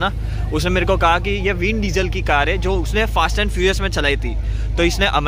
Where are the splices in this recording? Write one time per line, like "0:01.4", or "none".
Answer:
none